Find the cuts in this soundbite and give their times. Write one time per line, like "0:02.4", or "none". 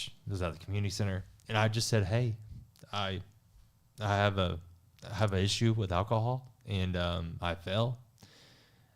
0:01.3